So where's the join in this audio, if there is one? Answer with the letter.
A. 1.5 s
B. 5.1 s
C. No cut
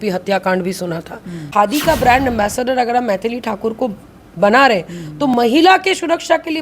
A